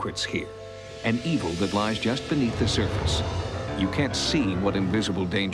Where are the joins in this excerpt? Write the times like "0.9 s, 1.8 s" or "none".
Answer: 2.9 s